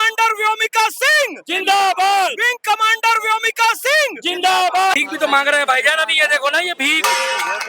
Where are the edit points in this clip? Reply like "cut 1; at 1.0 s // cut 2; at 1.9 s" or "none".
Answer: cut 1; at 4.9 s